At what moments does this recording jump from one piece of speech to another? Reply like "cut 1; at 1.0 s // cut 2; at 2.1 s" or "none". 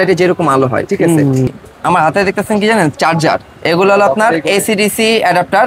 cut 1; at 1.5 s

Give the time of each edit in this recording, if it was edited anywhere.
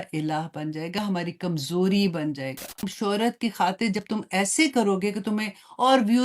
cut 1; at 2.9 s

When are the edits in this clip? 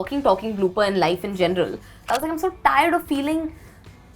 cut 1; at 2.0 s

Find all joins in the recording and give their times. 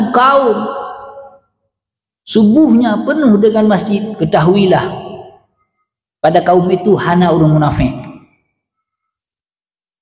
none

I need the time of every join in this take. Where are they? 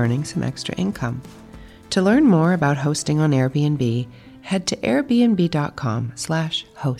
none

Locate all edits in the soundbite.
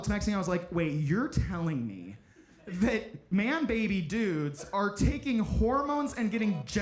cut 1; at 3.3 s

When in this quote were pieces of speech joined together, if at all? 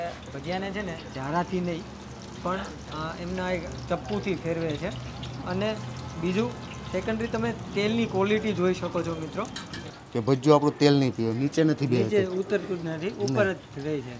cut 1; at 9.8 s

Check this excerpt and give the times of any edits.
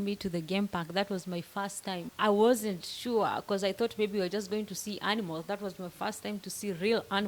cut 1; at 2.1 s

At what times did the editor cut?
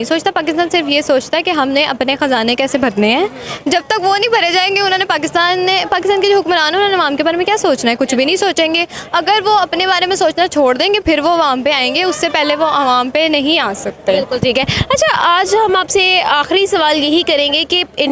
none

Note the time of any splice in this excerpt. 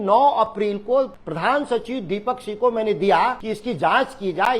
cut 1; at 1.2 s // cut 2; at 3.5 s

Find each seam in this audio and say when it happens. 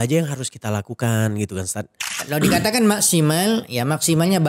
cut 1; at 2.1 s

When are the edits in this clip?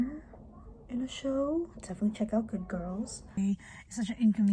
cut 1; at 3.4 s

